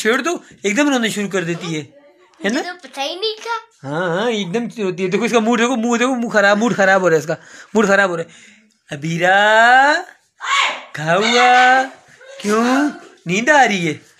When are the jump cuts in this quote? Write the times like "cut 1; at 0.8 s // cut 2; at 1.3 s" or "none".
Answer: none